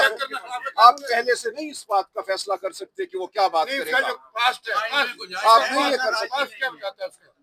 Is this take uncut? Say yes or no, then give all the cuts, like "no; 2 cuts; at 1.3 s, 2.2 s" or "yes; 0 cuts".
yes; 0 cuts